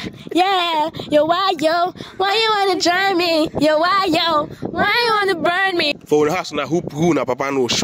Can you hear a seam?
yes; 1 cut; at 5.9 s

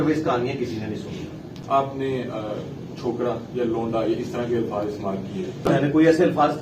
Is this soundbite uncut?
no; 2 cuts; at 1.4 s, 5.7 s

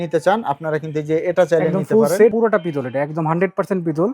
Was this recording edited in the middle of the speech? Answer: yes; 1 cut; at 2.3 s

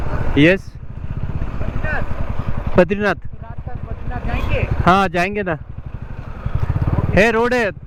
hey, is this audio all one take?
yes; 0 cuts

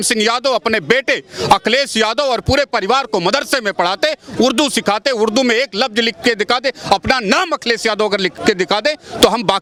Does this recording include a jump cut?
no; 0 cuts

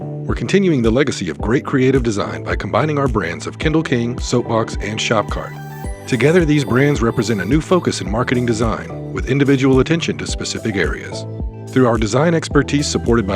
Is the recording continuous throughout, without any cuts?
yes; 0 cuts

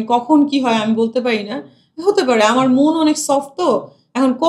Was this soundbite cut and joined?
no; 0 cuts

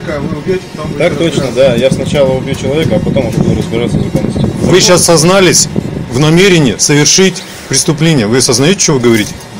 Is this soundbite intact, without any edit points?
no; 1 cut; at 4.5 s

